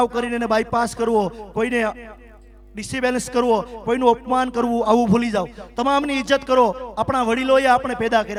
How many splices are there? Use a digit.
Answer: 0